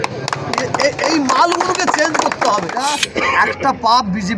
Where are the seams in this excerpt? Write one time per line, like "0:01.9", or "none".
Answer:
0:02.7